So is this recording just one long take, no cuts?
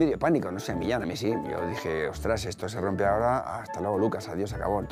yes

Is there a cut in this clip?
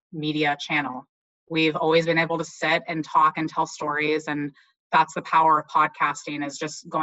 no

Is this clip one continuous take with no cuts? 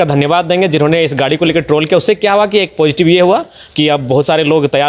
yes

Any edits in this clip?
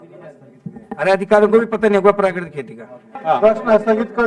yes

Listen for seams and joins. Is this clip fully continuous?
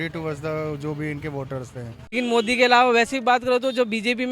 no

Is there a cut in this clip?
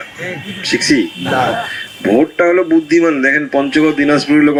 no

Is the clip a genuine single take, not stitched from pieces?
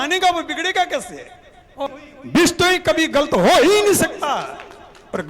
no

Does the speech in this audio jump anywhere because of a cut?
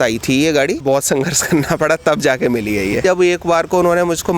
yes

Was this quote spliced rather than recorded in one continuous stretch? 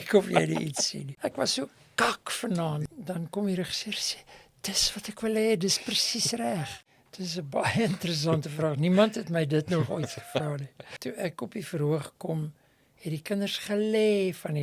yes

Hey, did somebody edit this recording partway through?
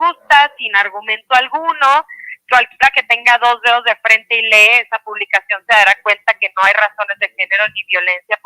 no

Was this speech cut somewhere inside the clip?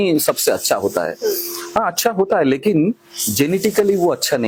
no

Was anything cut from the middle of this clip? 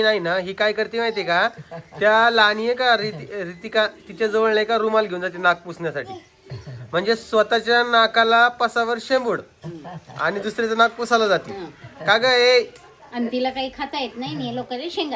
no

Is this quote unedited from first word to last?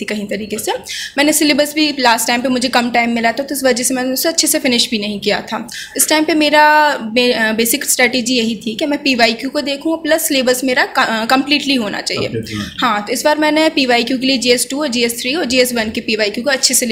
yes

